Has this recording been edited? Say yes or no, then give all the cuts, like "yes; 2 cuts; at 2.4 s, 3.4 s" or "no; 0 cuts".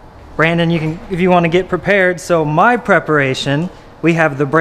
no; 0 cuts